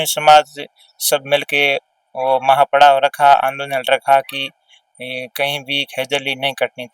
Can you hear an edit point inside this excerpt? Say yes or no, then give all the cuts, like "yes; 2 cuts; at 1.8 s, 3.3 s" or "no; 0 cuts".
no; 0 cuts